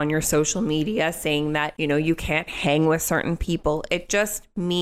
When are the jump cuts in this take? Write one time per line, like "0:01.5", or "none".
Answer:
0:02.0